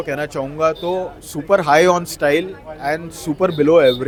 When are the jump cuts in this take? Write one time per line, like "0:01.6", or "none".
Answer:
none